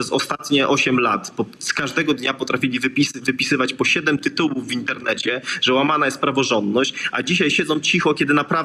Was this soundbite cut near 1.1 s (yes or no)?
no